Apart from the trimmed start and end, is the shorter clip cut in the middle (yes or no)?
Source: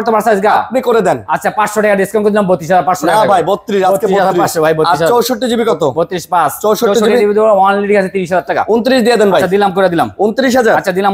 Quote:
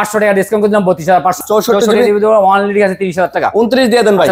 yes